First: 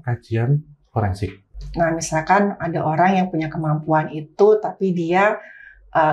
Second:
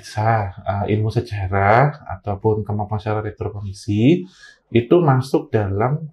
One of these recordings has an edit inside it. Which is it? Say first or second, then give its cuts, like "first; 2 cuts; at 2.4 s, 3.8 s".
first; 1 cut; at 1.4 s